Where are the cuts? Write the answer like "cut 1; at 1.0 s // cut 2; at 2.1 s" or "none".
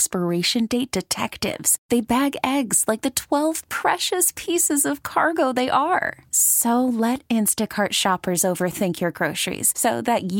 none